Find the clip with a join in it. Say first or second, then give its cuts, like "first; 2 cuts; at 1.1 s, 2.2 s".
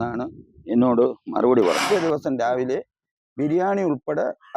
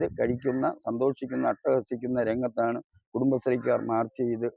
first; 1 cut; at 1.8 s